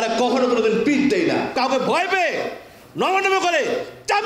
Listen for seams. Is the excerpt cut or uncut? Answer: cut